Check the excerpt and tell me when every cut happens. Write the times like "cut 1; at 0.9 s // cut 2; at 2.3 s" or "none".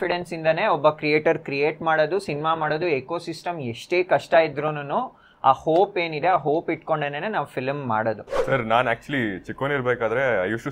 cut 1; at 8.4 s